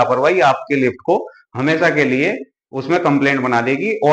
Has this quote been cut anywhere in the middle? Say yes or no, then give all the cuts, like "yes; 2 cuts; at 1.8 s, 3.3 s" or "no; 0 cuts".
no; 0 cuts